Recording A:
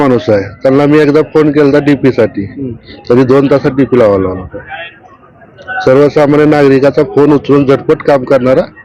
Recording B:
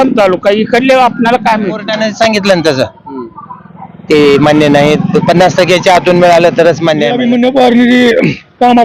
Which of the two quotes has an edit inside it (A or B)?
B